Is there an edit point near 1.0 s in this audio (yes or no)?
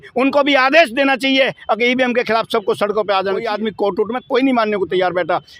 no